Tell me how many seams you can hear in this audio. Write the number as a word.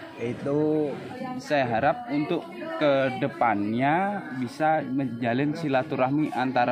one